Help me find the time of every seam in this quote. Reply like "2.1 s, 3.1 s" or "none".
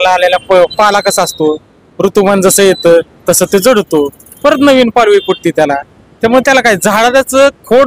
none

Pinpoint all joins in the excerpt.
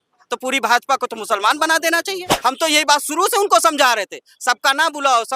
2.2 s

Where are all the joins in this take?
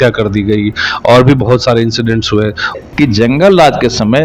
2.7 s

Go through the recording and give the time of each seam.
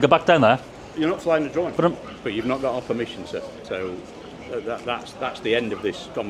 1.7 s

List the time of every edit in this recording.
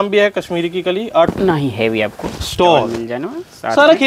1.3 s

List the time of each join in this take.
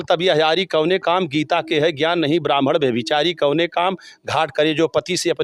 none

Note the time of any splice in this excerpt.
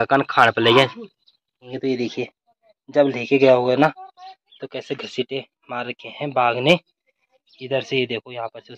1.7 s

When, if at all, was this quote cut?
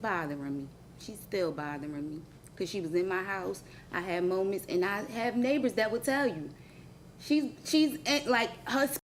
none

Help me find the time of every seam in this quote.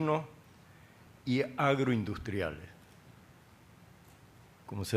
4.1 s

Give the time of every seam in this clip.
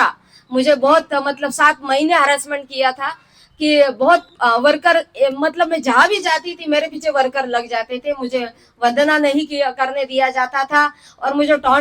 none

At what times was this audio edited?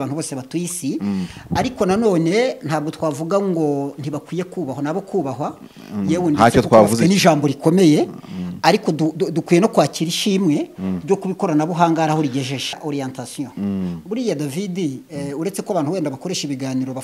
12.8 s

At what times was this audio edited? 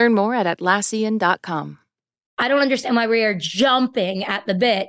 2.2 s

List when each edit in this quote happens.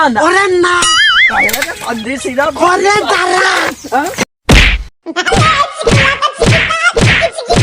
5.3 s

